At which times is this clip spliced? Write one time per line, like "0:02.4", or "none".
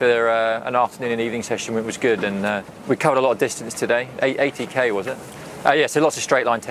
0:02.7
0:05.2